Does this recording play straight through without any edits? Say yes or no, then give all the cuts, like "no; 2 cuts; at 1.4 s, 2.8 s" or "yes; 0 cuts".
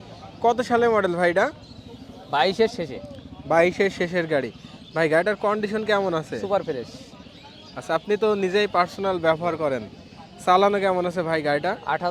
yes; 0 cuts